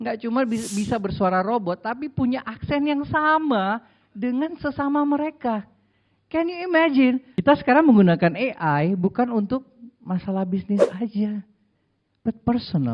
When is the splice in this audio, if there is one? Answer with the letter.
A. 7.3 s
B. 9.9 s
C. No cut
A